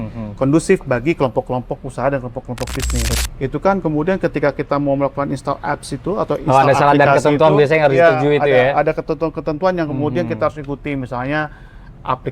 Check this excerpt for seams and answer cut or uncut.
cut